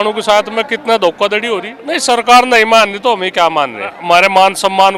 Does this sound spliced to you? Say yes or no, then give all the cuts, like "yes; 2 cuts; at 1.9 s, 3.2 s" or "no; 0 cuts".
yes; 2 cuts; at 1.7 s, 4.0 s